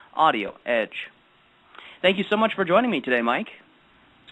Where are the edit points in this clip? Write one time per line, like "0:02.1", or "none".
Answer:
none